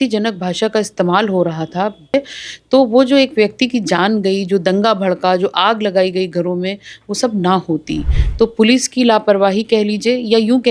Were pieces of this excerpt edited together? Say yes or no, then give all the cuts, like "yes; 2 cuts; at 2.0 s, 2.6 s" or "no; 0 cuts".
yes; 1 cut; at 2.1 s